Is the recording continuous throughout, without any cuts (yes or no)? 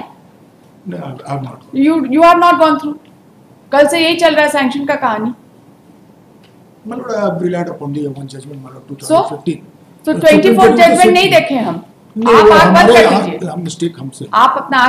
yes